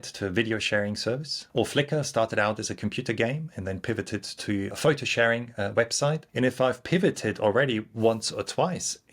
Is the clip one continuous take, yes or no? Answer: no